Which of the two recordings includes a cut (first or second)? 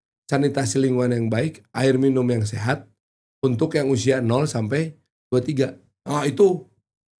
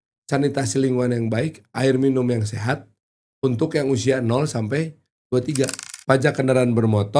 second